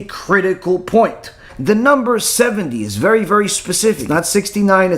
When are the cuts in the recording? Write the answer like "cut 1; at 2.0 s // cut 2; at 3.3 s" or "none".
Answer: cut 1; at 1.5 s // cut 2; at 4.0 s